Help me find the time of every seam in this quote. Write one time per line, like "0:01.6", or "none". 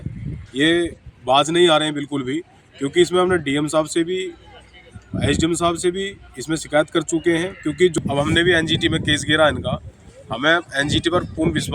0:07.9